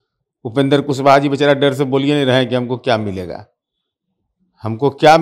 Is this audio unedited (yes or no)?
yes